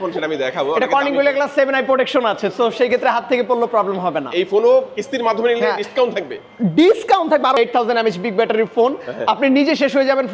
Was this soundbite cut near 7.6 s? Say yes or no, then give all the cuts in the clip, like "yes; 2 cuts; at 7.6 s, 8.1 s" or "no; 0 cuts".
yes; 1 cut; at 7.6 s